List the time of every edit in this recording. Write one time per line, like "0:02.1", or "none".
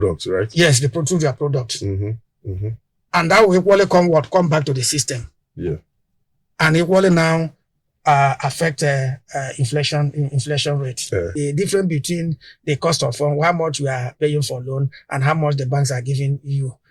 0:11.3